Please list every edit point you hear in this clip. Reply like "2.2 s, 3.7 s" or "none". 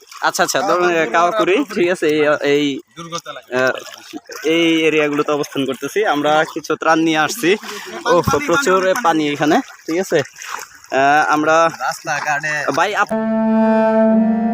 13.1 s